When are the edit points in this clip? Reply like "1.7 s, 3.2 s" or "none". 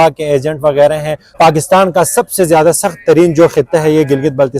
1.2 s